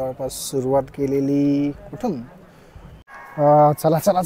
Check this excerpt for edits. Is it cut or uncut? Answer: cut